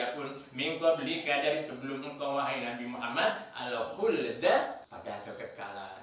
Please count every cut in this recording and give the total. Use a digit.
1